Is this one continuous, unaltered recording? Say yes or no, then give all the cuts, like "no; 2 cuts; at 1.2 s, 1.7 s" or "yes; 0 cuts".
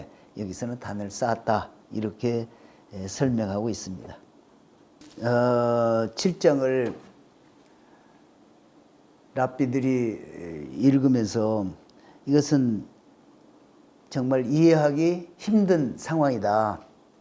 yes; 0 cuts